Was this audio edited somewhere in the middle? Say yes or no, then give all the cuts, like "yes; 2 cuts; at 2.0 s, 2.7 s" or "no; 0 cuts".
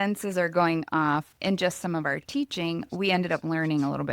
yes; 1 cut; at 1.3 s